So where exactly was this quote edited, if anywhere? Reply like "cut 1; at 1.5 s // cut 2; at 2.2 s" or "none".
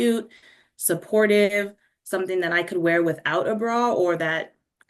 none